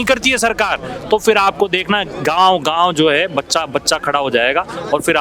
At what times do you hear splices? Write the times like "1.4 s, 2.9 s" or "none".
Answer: none